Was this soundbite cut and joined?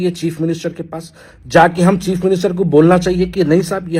no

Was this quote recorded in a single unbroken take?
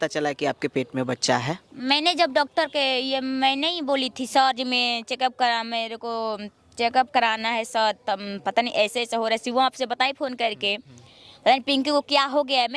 yes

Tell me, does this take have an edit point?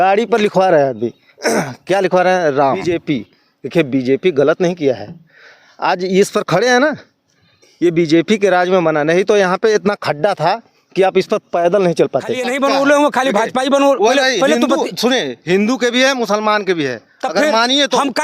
yes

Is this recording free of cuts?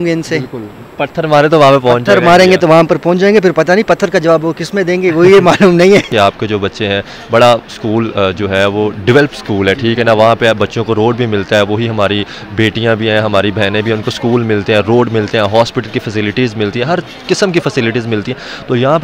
no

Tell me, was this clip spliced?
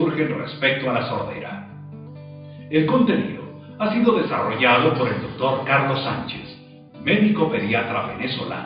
yes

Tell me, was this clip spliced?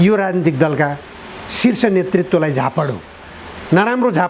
no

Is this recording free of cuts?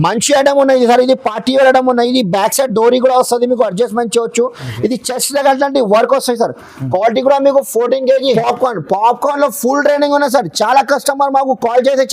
no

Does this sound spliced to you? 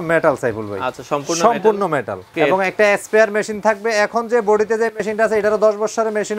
yes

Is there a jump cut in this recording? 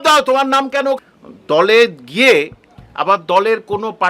yes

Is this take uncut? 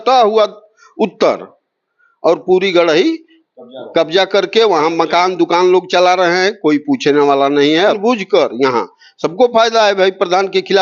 no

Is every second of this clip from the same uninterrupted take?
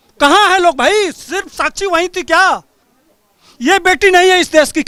yes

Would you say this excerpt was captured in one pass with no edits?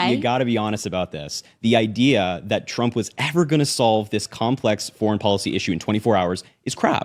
yes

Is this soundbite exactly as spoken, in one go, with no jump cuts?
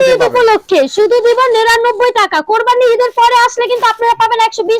yes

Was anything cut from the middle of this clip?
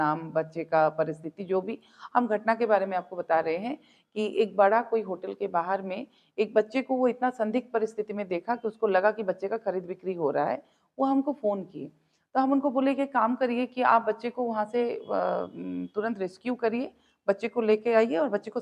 no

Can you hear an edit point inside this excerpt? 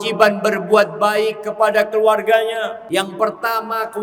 yes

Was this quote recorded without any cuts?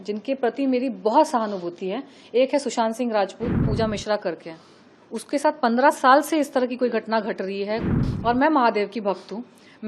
no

